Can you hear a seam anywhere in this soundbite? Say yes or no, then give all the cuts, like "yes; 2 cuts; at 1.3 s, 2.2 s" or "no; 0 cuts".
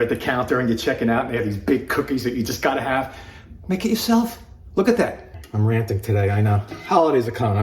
yes; 1 cut; at 5.3 s